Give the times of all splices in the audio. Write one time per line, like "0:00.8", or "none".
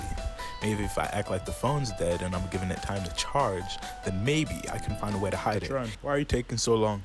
0:05.7